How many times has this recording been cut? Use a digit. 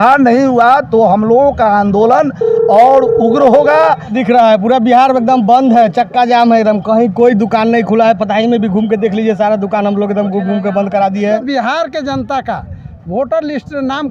2